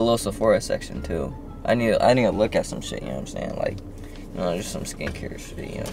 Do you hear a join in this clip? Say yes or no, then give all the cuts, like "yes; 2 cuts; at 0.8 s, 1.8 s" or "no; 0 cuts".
no; 0 cuts